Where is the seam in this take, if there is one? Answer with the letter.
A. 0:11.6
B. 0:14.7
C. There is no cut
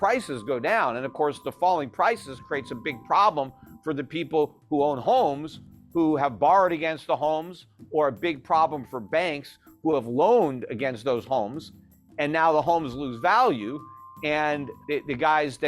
B